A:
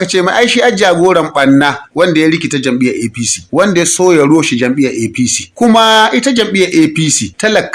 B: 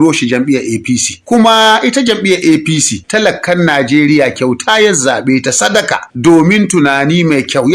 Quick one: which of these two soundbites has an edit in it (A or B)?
A